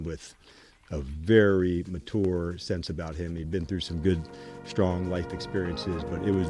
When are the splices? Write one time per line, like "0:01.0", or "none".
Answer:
none